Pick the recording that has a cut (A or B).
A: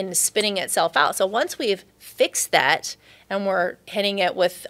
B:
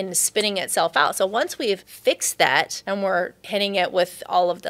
B